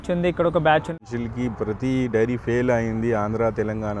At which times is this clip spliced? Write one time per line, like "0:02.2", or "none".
0:00.9

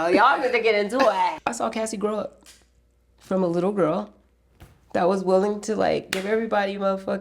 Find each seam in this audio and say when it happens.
0:01.3

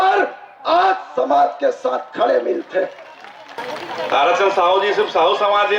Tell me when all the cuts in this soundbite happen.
0:03.5

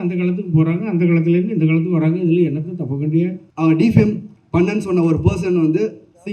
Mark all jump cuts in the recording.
0:03.4

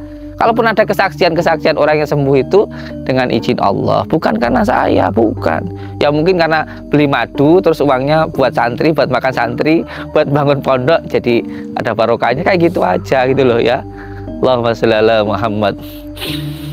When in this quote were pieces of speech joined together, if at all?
0:15.8

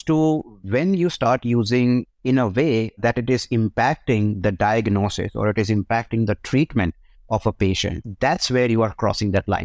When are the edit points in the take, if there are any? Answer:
none

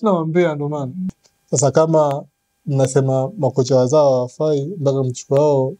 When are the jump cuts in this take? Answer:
0:01.2

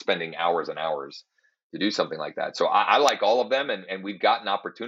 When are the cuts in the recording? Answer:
none

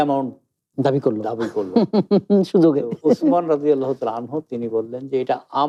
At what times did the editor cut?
none

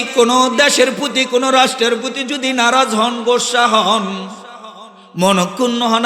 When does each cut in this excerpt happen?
none

